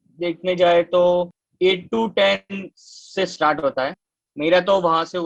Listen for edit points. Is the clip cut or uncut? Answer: uncut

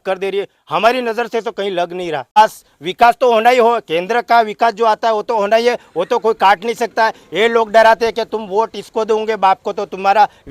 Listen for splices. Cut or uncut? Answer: cut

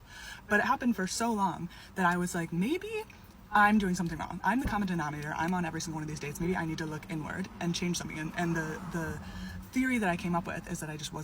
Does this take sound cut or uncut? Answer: cut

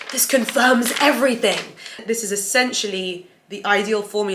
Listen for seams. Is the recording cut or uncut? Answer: cut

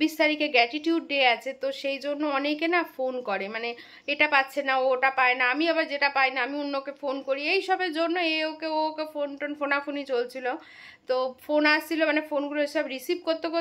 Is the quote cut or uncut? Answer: uncut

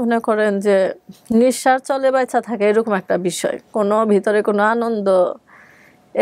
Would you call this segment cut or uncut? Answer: uncut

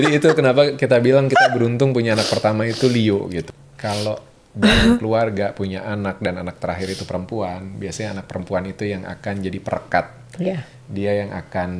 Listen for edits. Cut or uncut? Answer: cut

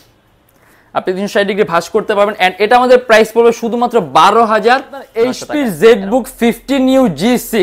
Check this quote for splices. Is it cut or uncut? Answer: cut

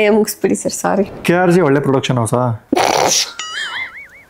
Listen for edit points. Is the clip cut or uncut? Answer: cut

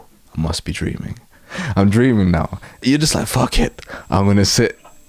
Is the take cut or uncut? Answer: cut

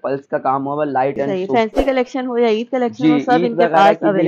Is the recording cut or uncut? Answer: cut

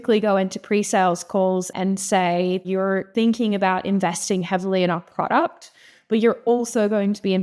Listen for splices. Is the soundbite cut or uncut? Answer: cut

